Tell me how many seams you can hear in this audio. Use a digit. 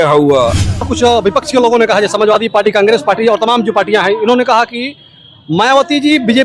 1